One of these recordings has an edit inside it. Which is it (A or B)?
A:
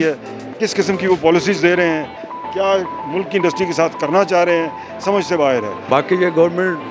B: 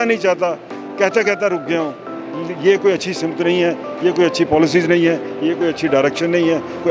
A